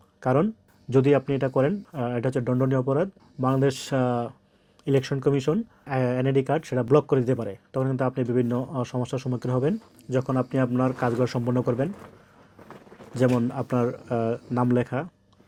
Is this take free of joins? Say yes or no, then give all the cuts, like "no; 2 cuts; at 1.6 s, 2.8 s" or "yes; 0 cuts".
yes; 0 cuts